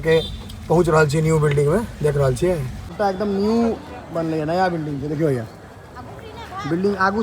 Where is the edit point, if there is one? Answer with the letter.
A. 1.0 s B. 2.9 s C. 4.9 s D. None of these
B